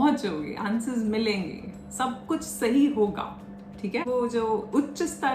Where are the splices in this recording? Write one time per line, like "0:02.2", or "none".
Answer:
0:04.0

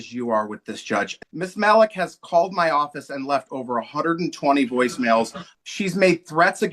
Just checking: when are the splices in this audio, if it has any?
0:01.2
0:05.4

